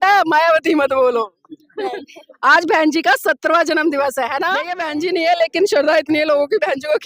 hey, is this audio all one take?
no; 1 cut; at 4.8 s

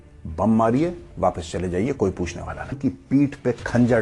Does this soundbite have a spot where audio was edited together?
yes; 1 cut; at 2.8 s

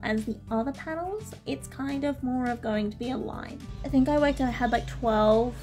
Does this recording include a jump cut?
yes; 1 cut; at 3.6 s

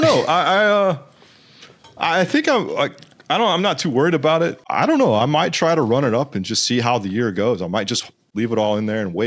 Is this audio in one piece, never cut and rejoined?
no; 2 cuts; at 4.6 s, 8.3 s

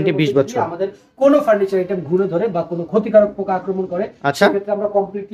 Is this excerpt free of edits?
yes; 0 cuts

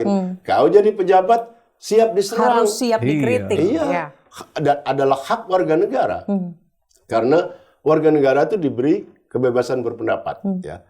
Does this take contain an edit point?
no; 0 cuts

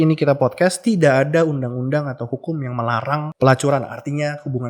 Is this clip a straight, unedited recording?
no; 1 cut; at 3.3 s

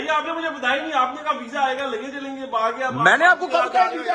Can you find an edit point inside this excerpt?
no; 0 cuts

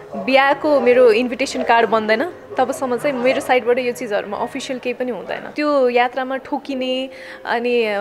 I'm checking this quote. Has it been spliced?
yes; 1 cut; at 5.5 s

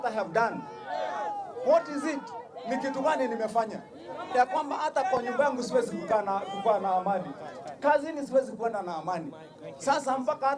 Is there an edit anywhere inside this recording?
no; 0 cuts

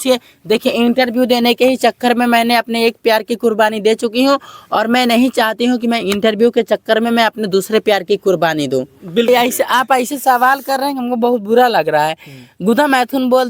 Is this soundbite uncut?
no; 1 cut; at 9.3 s

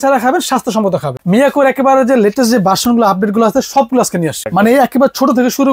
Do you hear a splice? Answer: yes; 2 cuts; at 1.1 s, 4.4 s

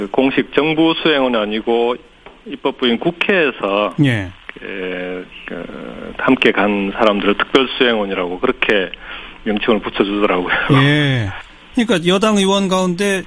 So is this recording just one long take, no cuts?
yes; 0 cuts

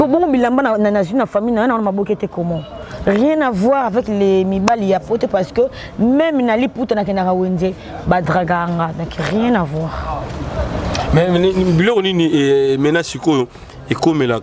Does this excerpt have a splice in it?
no; 0 cuts

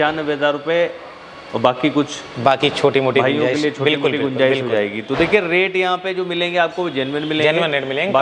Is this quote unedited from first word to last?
yes; 0 cuts

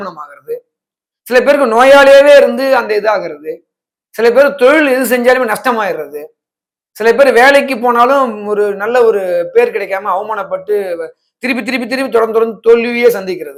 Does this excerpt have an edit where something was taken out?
no; 0 cuts

